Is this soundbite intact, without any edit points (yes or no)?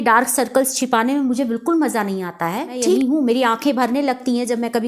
no